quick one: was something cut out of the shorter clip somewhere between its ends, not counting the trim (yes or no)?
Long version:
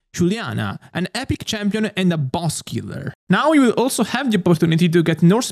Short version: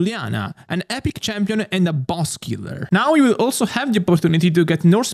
yes